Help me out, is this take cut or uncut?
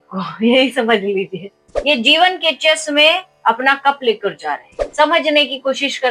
cut